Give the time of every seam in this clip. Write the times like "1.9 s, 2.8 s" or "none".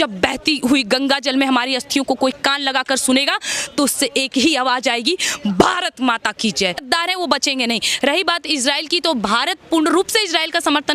6.8 s